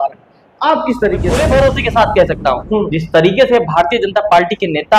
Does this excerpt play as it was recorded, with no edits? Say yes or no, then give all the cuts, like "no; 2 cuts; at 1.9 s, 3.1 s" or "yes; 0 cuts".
no; 1 cut; at 1.3 s